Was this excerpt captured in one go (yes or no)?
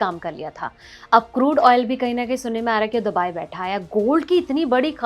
yes